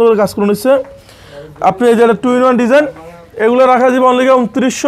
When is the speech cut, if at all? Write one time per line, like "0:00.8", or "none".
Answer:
none

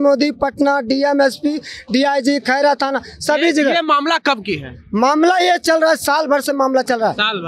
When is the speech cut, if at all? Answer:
none

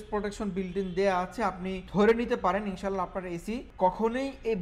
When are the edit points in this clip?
0:01.7
0:03.7

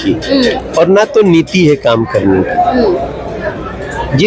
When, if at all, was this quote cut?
none

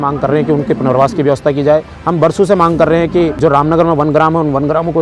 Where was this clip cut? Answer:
0:02.0
0:03.3

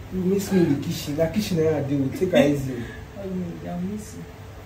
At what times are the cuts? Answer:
none

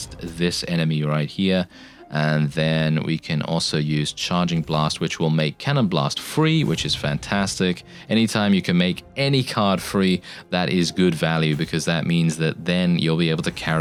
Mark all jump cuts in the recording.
none

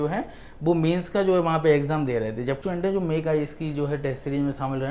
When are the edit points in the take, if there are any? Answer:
0:02.6

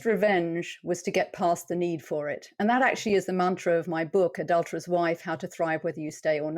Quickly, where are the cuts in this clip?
none

